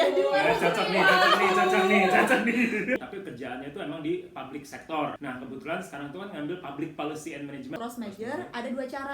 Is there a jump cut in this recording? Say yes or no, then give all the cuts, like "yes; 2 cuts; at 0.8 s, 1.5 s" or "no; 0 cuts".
yes; 3 cuts; at 3.0 s, 5.2 s, 7.8 s